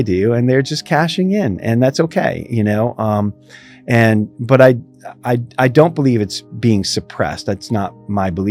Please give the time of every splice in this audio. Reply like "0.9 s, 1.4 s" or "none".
none